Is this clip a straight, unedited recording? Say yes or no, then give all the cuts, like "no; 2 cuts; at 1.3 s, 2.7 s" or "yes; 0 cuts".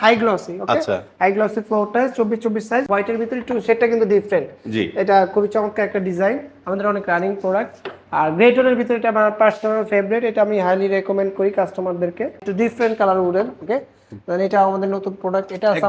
no; 2 cuts; at 2.9 s, 12.4 s